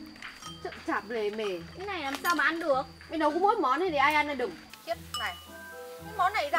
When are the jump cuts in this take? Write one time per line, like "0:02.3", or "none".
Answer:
0:04.7